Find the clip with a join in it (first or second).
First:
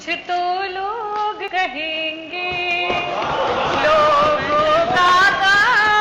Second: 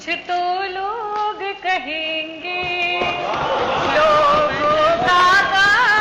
first